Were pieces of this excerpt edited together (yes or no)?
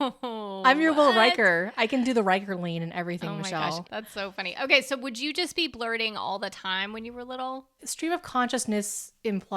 yes